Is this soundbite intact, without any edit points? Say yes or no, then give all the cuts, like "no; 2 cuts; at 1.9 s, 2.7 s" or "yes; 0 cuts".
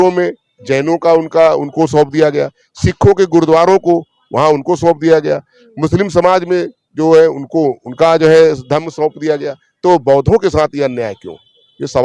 yes; 0 cuts